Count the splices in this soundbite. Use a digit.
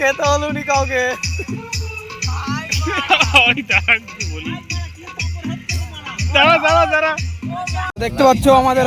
1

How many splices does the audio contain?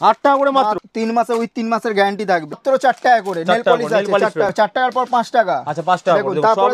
3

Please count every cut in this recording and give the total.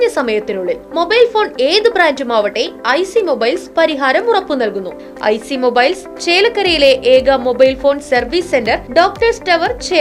1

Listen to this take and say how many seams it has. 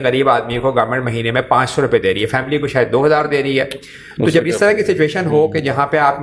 0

